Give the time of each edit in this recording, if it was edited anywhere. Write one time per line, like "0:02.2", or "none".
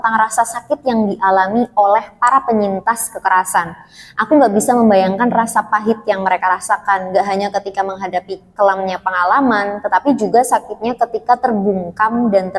none